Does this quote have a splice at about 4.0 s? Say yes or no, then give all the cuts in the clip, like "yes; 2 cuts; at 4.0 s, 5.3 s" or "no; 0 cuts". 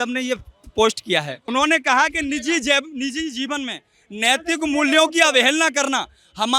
no; 1 cut; at 1.4 s